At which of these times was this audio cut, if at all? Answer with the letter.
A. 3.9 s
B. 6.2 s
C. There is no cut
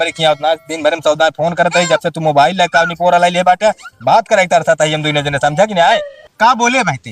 B